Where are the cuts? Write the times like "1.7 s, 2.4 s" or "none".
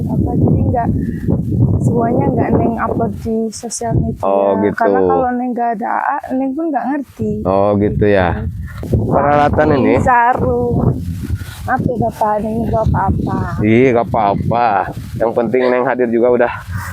8.9 s